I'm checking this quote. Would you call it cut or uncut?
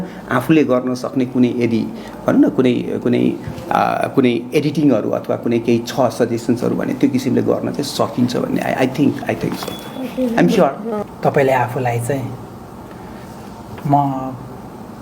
cut